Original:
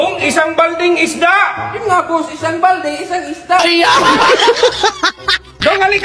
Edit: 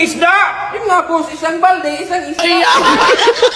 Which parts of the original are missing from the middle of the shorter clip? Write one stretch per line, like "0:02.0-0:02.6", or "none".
0:03.4-0:03.6